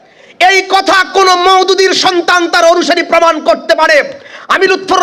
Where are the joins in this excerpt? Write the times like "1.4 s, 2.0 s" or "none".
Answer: none

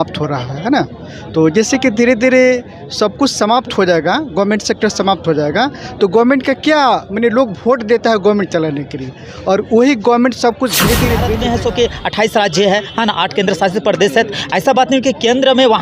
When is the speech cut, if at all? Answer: 11.3 s

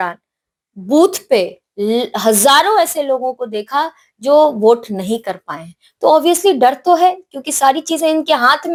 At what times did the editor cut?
none

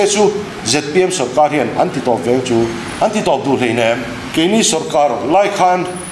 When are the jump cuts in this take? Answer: 2.8 s, 4.2 s

